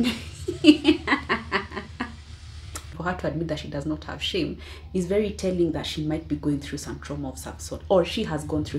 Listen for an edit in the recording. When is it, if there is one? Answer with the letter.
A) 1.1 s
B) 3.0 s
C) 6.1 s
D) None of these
B